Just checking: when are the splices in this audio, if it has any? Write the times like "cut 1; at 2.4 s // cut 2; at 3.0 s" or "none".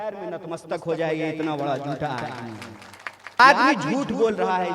cut 1; at 3.4 s